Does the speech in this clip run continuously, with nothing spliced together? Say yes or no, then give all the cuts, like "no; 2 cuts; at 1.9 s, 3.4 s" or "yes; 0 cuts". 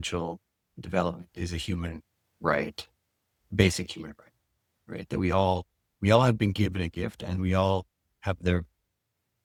yes; 0 cuts